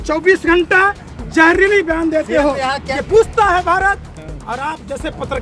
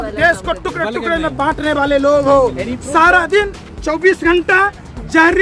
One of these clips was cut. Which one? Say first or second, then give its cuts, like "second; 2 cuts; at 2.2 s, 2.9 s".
first; 1 cut; at 2.8 s